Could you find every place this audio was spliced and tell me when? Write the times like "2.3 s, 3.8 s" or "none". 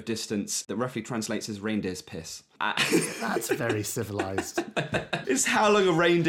0.7 s, 2.6 s, 5.2 s